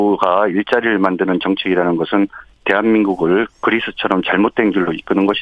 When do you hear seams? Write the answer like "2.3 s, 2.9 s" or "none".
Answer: 2.4 s